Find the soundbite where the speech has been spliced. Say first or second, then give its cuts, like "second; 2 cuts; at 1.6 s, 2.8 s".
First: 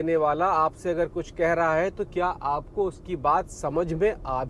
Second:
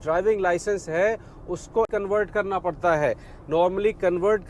second; 1 cut; at 1.9 s